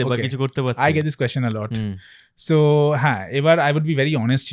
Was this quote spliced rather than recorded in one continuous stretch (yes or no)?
no